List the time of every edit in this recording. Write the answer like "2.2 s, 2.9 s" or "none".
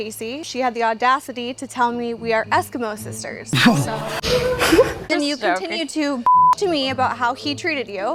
none

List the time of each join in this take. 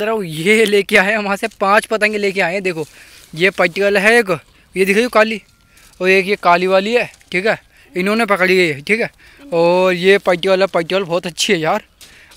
none

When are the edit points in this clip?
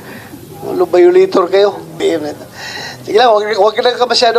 2.0 s

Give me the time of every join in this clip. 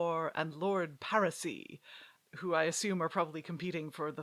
none

